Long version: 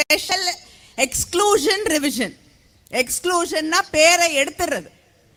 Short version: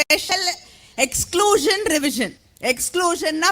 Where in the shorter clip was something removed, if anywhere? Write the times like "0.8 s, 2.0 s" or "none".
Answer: 2.4 s